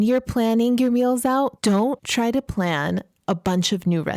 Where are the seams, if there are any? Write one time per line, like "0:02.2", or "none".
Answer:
0:01.7